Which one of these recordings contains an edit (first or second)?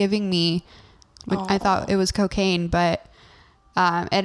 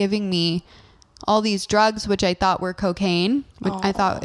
first